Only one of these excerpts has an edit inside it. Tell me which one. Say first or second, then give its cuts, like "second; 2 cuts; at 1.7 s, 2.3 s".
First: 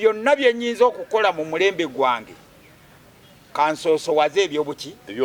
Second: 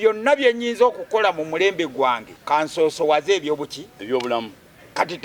second; 1 cut; at 2.3 s